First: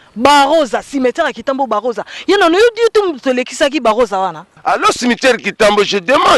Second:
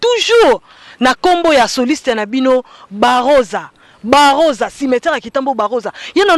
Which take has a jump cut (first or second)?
first